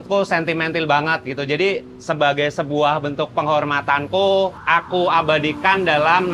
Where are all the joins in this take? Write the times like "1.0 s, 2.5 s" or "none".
4.6 s